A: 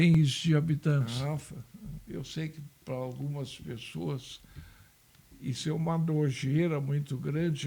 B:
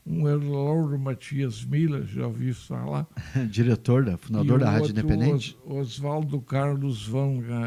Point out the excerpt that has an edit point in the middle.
A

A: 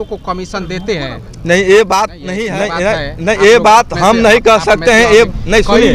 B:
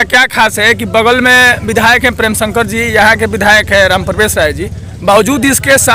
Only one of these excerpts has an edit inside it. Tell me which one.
A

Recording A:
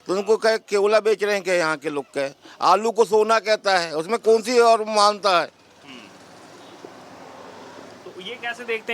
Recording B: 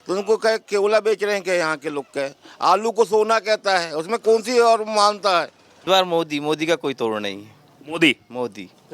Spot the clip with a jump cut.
B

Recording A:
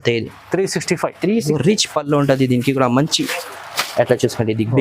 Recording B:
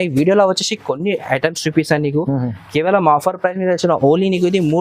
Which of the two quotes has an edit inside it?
A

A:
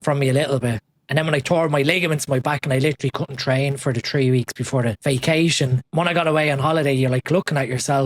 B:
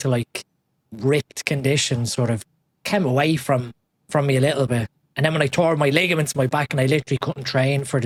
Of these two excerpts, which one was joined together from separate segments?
A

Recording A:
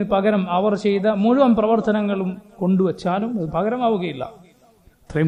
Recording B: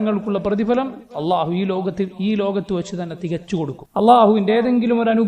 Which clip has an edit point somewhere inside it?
B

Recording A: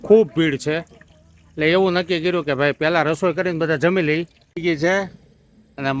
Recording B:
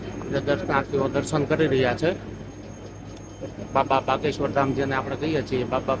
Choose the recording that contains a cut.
A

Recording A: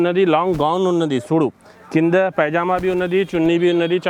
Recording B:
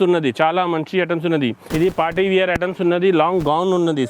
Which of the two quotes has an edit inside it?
B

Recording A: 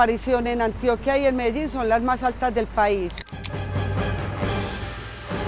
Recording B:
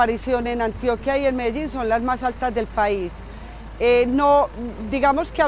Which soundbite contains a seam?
A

